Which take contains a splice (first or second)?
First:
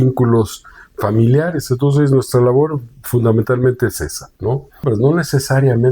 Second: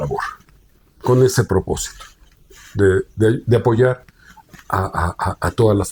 first